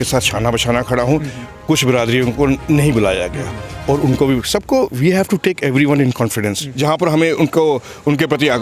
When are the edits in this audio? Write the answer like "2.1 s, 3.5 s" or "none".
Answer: 6.6 s